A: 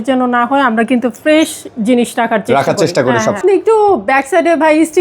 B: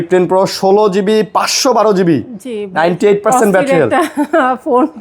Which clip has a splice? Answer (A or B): A